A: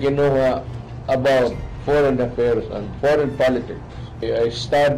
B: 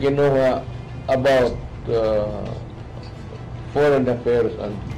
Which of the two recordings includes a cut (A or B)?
A